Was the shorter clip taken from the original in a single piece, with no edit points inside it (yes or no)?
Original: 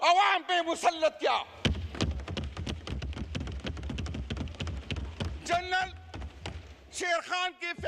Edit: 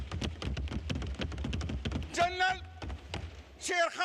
no